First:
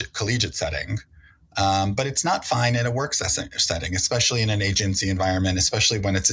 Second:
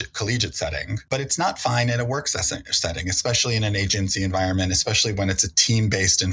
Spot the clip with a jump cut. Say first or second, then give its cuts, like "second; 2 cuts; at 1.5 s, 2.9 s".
second; 1 cut; at 1.1 s